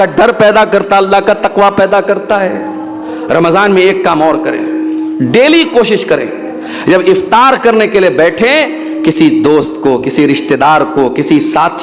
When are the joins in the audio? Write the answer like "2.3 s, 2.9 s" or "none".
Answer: 3.1 s

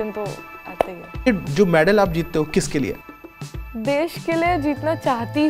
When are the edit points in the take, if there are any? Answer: 1.3 s, 3.1 s

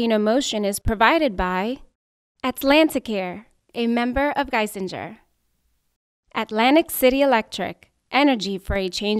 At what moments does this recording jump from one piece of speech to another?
none

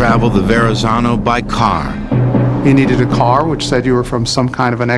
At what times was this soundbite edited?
none

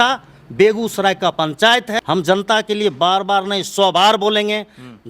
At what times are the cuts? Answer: 2.0 s

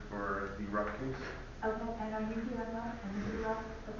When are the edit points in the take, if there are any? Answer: none

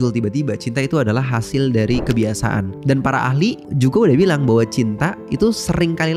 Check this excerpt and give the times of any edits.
2.8 s, 3.7 s

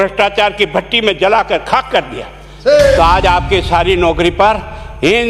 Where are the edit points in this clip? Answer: 3.0 s

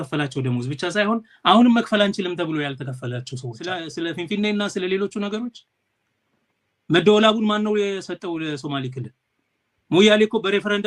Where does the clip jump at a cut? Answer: 3.7 s

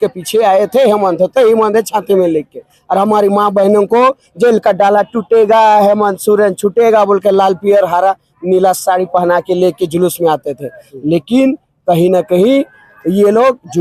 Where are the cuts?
none

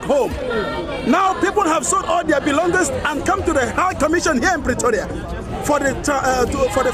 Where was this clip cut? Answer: none

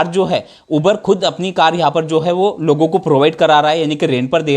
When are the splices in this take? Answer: none

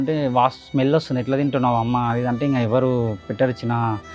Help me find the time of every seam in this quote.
none

